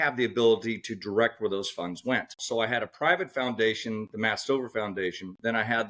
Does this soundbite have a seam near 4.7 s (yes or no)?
no